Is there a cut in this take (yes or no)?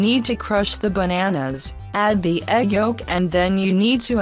no